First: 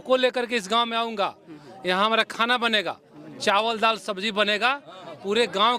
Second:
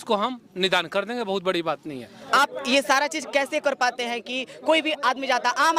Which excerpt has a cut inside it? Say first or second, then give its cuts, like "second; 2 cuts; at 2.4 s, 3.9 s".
second; 1 cut; at 2.2 s